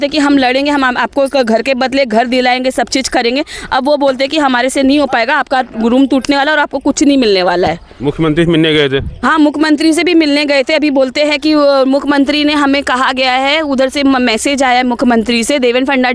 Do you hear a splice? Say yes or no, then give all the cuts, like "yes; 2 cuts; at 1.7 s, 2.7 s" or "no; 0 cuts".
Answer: no; 0 cuts